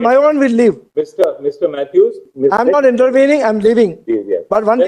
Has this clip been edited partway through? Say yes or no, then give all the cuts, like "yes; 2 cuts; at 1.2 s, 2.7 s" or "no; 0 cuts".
yes; 1 cut; at 2.2 s